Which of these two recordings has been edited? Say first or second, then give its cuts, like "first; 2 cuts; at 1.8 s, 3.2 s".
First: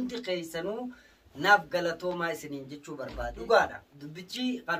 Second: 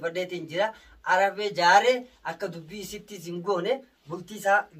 first; 1 cut; at 3.3 s